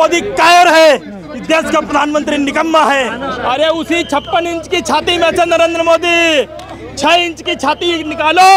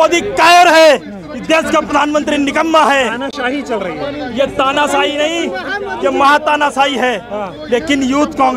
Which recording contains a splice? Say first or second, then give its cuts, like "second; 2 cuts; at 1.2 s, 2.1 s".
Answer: first; 1 cut; at 3.3 s